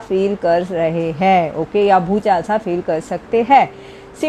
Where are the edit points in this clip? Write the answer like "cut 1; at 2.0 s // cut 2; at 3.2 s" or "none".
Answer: none